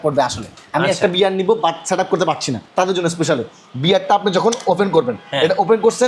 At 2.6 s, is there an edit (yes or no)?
yes